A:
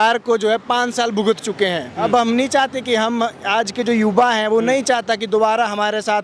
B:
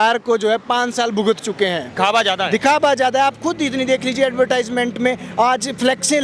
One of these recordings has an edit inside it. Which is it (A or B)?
B